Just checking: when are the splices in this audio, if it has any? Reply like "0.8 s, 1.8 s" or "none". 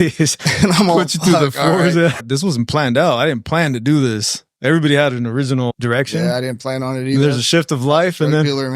2.2 s